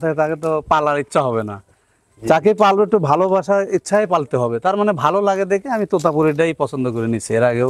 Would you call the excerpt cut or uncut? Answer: uncut